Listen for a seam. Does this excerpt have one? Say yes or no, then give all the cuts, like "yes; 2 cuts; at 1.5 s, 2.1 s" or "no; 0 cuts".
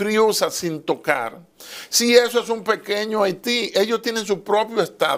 no; 0 cuts